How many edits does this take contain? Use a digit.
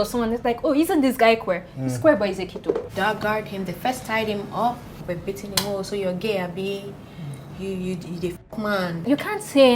3